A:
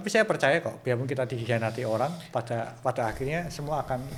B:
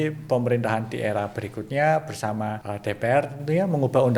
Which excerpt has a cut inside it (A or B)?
B